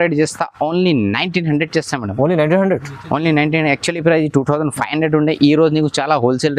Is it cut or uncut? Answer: uncut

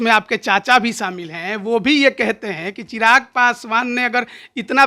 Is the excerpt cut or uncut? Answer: uncut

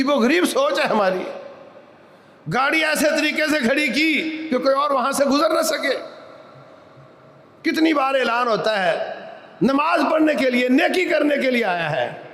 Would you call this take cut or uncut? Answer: uncut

